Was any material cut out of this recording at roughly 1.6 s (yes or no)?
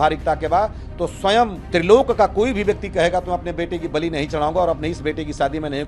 yes